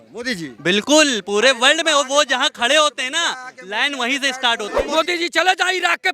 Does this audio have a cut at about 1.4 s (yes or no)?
no